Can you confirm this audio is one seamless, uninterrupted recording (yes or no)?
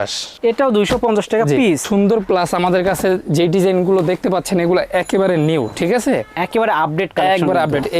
no